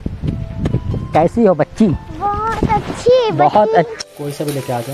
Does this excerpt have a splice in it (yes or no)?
yes